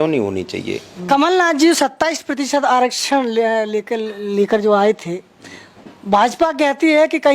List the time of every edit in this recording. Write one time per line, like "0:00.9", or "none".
0:00.9